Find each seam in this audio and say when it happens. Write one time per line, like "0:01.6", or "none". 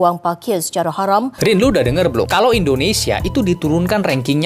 0:01.3